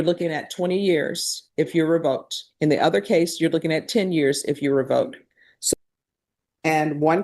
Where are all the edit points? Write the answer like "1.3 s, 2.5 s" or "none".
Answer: 5.7 s

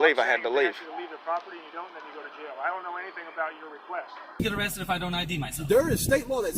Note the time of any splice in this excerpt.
4.3 s

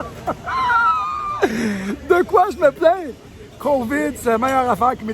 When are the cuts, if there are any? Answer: none

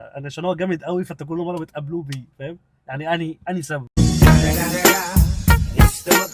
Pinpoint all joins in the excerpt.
none

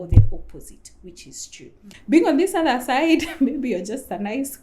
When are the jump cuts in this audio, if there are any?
1.9 s

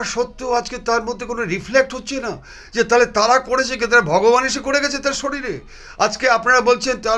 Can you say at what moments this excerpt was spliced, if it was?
none

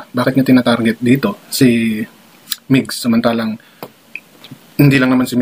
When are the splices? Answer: none

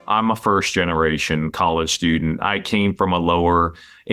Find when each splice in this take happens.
none

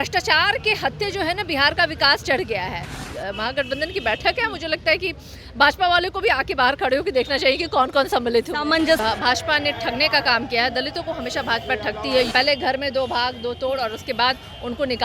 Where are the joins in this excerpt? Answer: 3.0 s, 9.0 s, 12.3 s

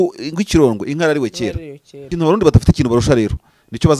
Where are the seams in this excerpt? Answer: 2.1 s

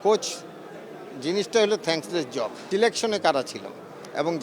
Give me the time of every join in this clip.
2.6 s

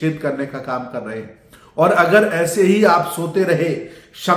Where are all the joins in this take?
none

